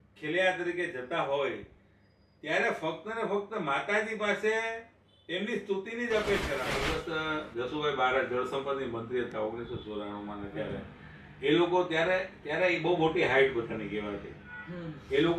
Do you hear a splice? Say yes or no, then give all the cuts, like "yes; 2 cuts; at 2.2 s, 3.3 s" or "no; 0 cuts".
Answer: yes; 1 cut; at 6.8 s